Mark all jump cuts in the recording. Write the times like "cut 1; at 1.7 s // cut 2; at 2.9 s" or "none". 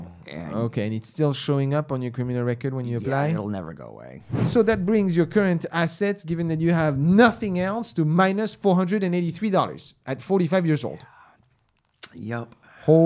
cut 1; at 4.4 s